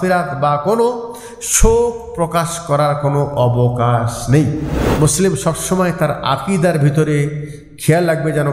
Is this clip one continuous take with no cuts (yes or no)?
no